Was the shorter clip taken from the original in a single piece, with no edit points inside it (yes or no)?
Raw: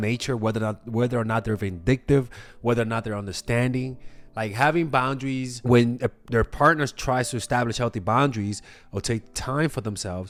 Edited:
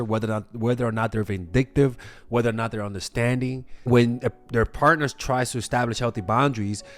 no